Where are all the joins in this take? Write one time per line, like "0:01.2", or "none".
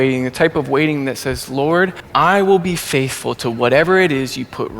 0:02.0